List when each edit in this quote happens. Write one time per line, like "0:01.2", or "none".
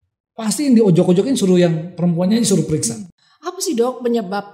0:02.9

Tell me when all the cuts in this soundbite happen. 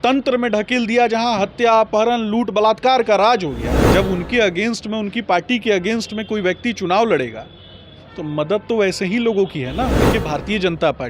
0:03.7
0:10.0

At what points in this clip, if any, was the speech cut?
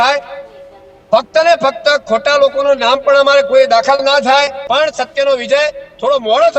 0:04.6

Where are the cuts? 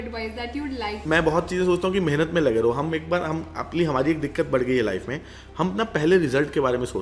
0:01.0

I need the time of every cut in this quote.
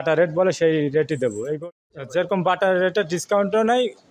0:01.6

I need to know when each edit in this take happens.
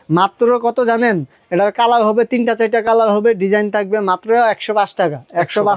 none

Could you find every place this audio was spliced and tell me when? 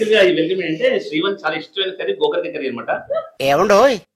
none

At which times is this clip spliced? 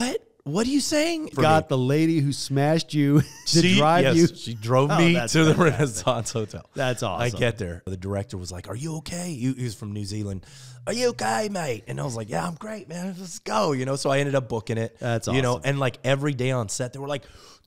0:01.3
0:07.9

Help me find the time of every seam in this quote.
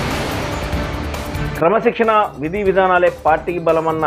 none

